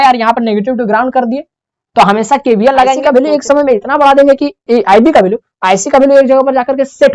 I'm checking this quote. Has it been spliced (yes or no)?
yes